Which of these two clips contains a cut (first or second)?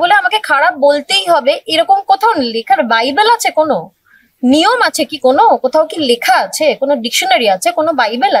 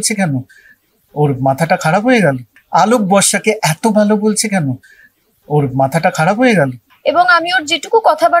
second